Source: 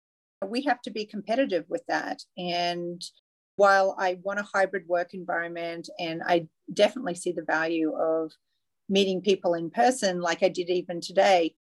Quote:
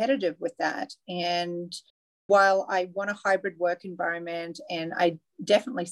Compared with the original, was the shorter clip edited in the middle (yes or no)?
no